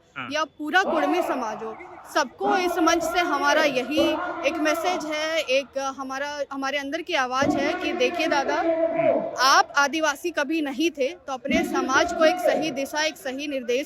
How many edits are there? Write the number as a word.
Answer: zero